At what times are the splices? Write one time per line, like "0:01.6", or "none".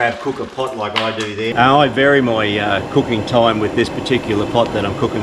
0:01.5